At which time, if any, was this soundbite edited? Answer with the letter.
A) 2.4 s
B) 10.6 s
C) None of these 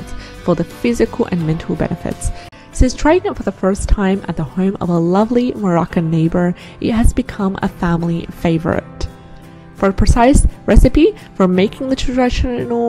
A